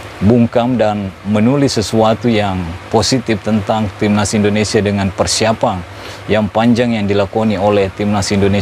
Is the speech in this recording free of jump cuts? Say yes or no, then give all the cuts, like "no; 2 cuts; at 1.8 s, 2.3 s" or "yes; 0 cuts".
yes; 0 cuts